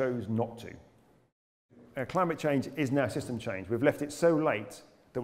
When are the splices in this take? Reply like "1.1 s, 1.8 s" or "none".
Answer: 1.6 s